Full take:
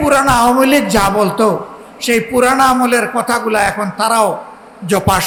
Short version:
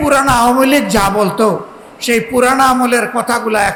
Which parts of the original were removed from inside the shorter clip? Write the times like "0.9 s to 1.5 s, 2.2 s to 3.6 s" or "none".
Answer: none